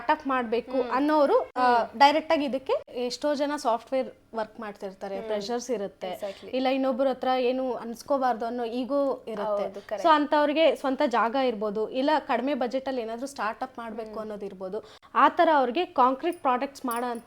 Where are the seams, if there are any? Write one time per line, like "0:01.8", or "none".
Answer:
0:02.9